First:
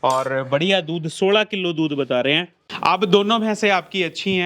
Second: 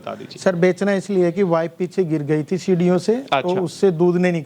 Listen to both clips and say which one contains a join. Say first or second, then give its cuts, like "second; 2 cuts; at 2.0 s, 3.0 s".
first; 1 cut; at 2.6 s